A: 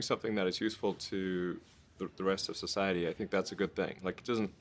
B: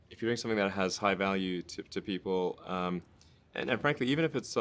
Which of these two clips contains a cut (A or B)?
A